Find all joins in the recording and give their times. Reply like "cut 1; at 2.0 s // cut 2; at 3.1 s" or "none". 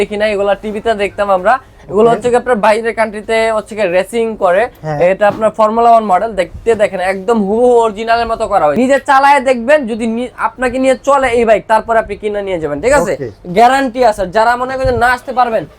cut 1; at 8.7 s